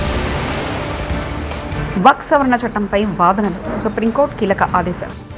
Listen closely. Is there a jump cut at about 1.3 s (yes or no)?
yes